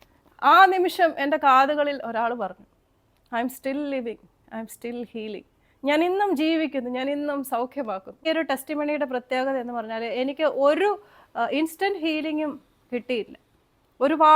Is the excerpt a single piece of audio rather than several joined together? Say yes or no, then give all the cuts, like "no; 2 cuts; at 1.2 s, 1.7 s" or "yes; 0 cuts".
no; 1 cut; at 8.1 s